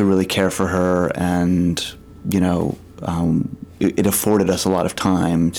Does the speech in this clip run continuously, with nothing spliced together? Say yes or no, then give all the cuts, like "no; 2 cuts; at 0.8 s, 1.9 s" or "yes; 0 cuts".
yes; 0 cuts